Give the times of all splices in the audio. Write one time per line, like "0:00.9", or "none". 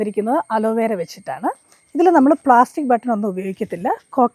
none